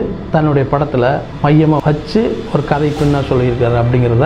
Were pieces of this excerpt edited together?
yes; 1 cut; at 1.8 s

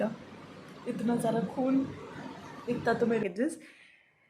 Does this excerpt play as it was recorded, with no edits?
no; 1 cut; at 3.2 s

